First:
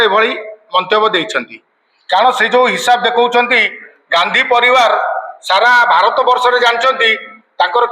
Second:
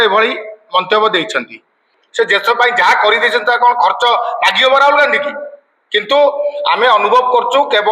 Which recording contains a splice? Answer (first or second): second